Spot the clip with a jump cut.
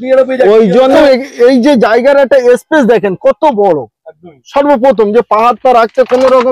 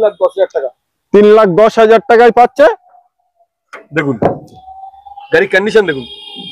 first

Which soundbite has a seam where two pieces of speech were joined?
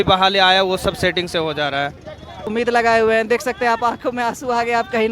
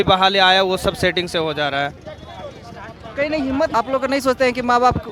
first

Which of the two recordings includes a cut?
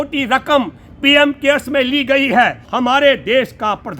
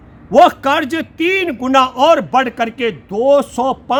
first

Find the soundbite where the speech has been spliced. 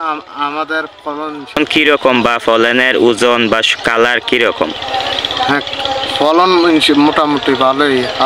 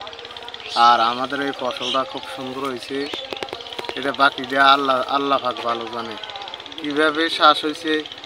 first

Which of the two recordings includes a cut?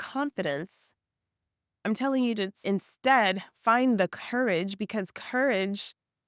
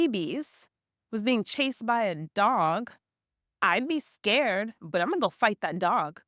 first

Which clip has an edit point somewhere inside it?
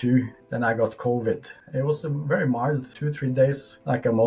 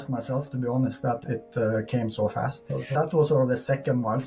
second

